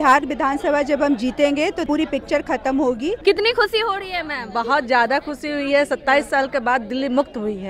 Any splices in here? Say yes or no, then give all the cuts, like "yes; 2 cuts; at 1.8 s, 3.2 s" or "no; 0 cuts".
yes; 2 cuts; at 1.8 s, 3.2 s